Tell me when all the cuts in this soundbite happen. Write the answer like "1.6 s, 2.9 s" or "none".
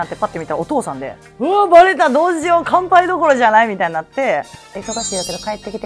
1.2 s, 4.6 s